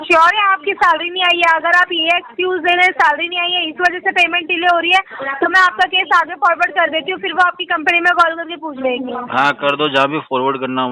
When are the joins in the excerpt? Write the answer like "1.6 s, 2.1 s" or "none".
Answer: none